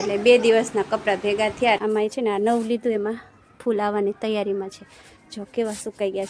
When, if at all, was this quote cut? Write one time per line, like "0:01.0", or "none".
0:01.8